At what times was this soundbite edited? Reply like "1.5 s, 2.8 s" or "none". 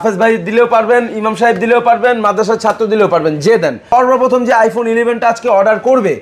3.9 s